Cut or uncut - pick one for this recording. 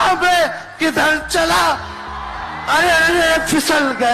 uncut